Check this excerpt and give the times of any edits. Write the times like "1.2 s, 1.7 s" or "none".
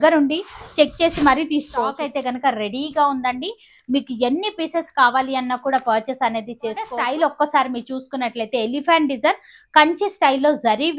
2.1 s, 7.0 s